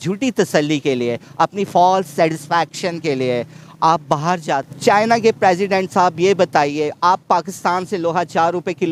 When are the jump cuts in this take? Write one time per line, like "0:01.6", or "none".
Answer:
0:04.7